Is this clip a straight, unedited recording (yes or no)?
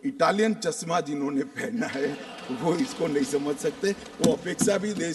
yes